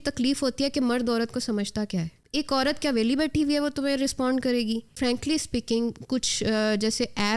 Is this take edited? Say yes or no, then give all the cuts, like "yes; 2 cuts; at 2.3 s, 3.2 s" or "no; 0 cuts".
yes; 2 cuts; at 2.2 s, 4.9 s